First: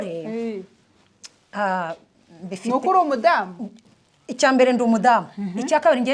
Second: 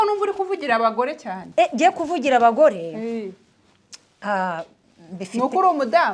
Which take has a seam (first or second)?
second